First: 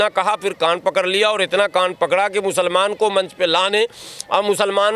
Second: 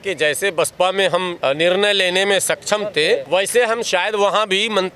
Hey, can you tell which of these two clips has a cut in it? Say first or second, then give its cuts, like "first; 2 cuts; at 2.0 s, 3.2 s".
second; 2 cuts; at 1.3 s, 3.2 s